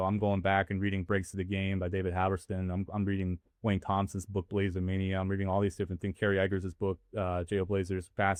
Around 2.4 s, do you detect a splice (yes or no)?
no